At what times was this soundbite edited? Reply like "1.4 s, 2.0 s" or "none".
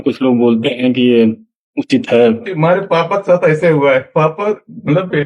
2.5 s, 4.1 s